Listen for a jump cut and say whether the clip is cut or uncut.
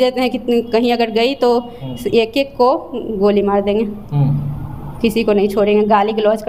uncut